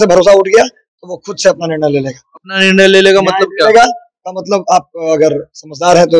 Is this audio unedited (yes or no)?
yes